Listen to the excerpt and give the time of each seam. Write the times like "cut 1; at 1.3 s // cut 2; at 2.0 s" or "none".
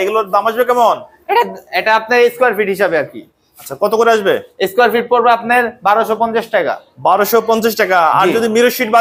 none